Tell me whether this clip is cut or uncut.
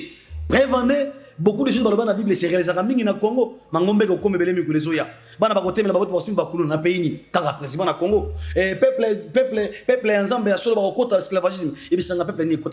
uncut